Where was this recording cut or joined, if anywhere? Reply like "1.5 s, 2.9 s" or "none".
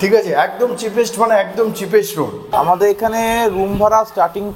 2.5 s

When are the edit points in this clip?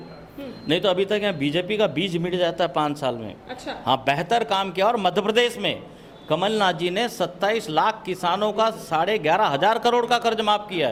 none

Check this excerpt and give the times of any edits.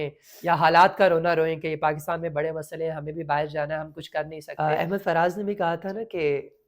4.4 s

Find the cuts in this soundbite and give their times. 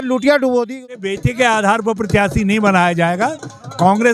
1.0 s

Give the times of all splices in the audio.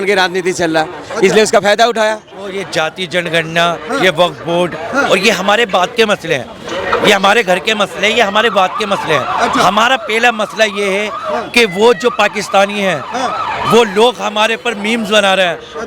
2.6 s

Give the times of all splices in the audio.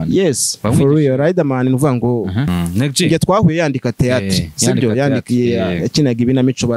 2.5 s

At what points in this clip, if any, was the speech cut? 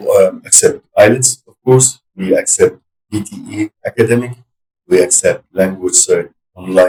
none

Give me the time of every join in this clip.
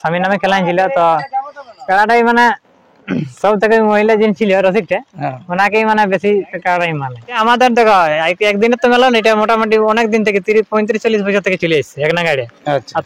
7.4 s

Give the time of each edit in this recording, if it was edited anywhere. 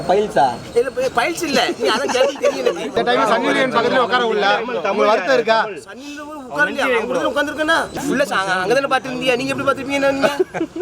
2.9 s, 8.0 s

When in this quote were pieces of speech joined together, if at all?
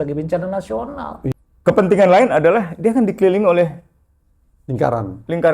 1.3 s

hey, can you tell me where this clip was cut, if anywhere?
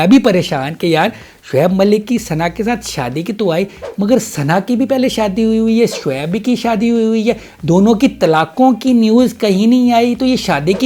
none

